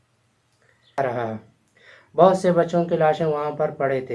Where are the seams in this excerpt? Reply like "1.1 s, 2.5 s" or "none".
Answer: 1.0 s